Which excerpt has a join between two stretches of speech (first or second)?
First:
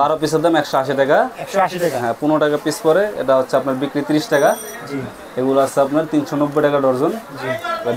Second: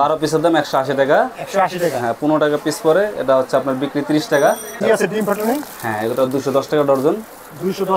second